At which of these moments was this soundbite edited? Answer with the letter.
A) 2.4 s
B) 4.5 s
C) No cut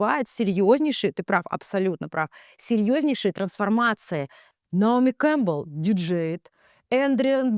B